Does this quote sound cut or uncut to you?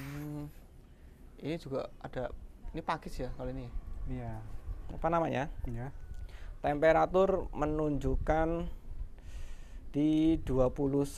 cut